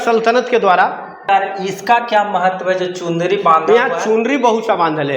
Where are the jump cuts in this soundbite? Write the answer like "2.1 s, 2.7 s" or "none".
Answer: 1.2 s